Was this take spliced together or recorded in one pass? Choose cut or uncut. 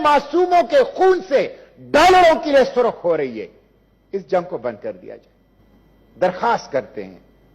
uncut